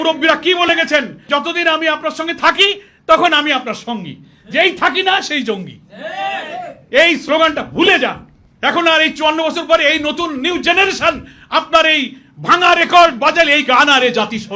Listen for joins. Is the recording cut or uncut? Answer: cut